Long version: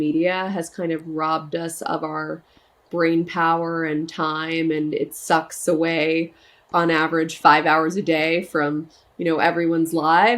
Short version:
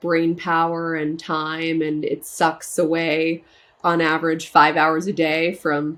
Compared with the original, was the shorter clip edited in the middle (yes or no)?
no